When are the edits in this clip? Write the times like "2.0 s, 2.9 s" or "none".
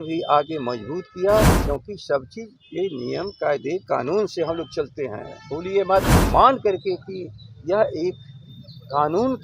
1.6 s, 6.2 s